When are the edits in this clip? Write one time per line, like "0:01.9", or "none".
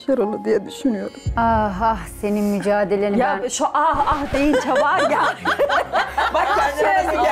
0:01.3